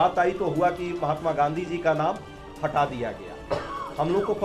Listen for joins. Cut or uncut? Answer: uncut